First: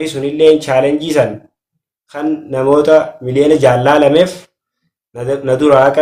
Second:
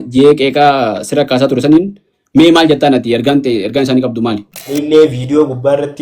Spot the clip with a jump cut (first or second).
second